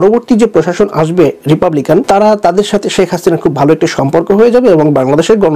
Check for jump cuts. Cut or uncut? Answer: uncut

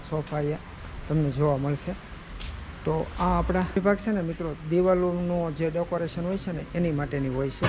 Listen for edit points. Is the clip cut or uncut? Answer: cut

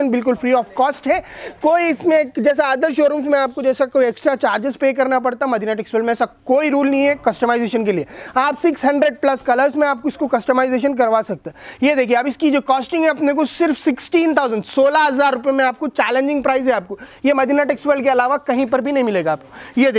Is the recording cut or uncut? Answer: uncut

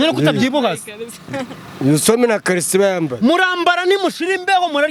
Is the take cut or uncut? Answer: uncut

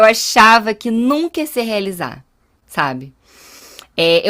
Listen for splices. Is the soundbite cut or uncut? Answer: uncut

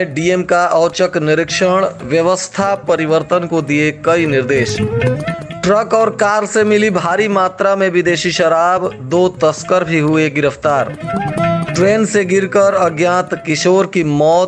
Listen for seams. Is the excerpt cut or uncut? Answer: uncut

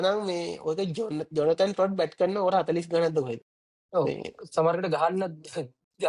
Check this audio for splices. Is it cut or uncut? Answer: uncut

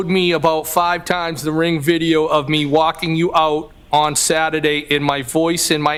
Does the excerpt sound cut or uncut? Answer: uncut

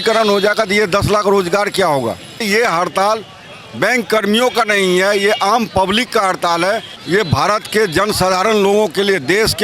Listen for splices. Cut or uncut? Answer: cut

